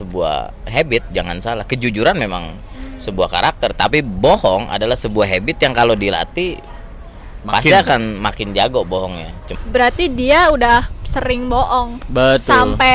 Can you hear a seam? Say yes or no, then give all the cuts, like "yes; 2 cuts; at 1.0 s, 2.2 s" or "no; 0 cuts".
yes; 1 cut; at 9.4 s